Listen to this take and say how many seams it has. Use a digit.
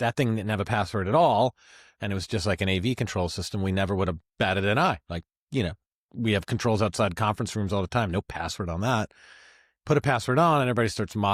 0